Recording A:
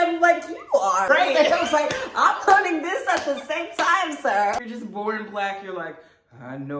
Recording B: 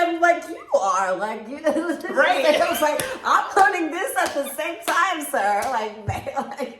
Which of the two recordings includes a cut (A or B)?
A